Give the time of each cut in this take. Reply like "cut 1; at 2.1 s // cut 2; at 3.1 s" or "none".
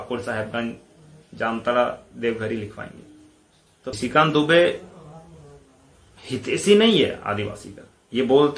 cut 1; at 4.0 s